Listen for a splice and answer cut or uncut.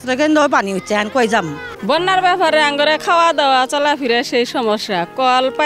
cut